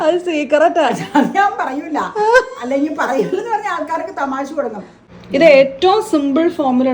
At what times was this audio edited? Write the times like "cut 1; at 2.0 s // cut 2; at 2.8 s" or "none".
cut 1; at 4.9 s